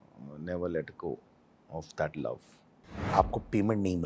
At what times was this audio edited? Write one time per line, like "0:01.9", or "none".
0:03.1